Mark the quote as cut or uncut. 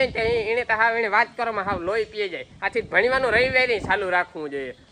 uncut